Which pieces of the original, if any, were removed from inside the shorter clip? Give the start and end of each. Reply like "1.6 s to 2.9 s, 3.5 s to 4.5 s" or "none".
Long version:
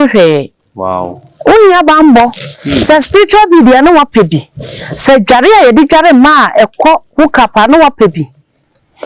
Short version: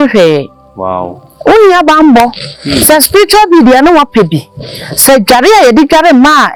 none